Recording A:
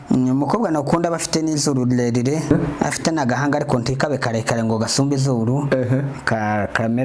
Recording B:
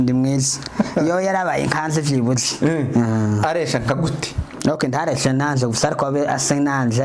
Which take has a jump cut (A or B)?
A